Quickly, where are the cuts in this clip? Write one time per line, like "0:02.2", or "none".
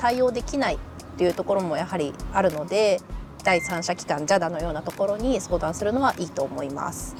none